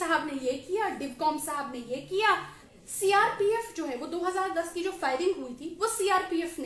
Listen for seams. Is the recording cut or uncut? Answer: cut